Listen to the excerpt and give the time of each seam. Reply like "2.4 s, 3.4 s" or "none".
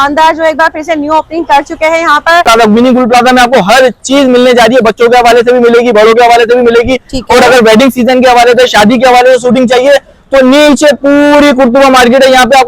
2.5 s